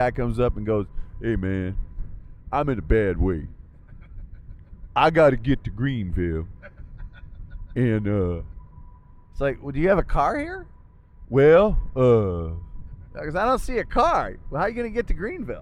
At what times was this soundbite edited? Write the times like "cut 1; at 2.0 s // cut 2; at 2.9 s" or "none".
none